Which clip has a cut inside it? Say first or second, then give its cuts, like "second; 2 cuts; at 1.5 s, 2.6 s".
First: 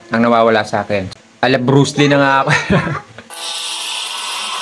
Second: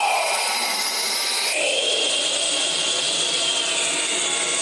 first; 2 cuts; at 1.1 s, 3.2 s